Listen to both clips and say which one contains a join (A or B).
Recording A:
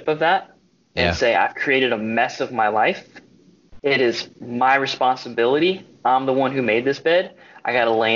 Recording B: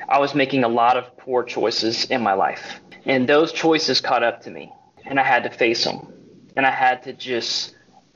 B